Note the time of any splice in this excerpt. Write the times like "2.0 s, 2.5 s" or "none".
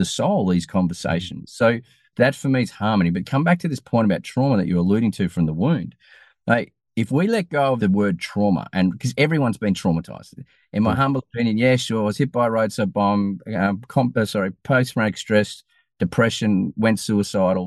2.0 s, 7.8 s

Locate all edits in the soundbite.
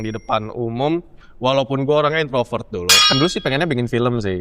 3.1 s

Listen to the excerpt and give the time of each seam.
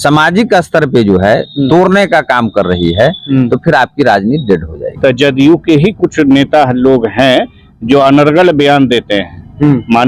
4.8 s

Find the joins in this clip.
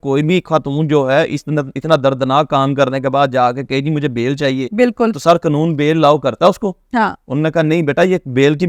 none

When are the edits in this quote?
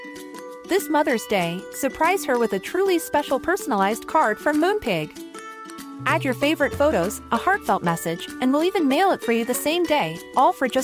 none

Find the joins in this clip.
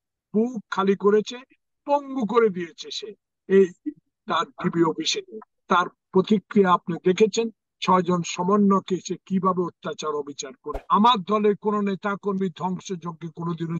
10.7 s

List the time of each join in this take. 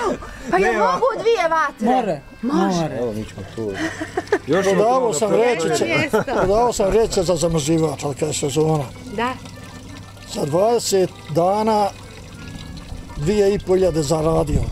3.0 s

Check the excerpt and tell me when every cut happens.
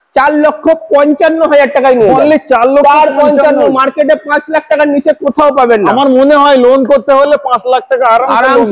none

